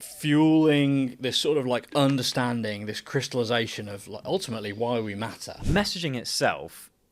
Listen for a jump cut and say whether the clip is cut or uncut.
cut